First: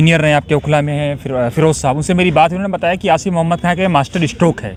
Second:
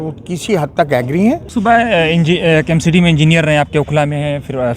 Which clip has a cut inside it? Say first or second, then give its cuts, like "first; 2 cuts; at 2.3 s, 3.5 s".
second; 1 cut; at 1.5 s